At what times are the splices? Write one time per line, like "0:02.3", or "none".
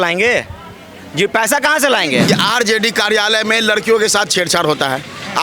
0:02.3